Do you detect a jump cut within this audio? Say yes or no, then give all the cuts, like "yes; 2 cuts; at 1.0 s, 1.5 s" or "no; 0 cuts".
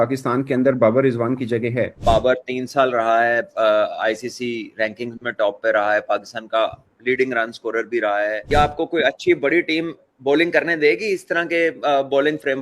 yes; 2 cuts; at 2.0 s, 8.4 s